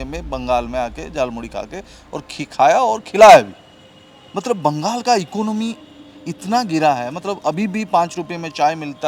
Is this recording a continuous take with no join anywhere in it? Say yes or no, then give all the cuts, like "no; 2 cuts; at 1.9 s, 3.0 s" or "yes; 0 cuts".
yes; 0 cuts